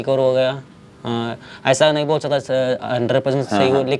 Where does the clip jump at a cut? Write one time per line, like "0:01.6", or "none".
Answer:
none